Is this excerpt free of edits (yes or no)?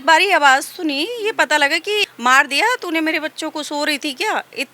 no